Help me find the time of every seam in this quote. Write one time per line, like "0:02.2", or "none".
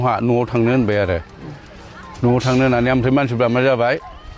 none